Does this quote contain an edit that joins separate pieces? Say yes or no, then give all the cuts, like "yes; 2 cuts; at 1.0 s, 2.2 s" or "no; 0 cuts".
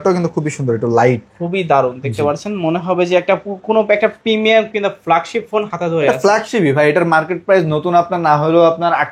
no; 0 cuts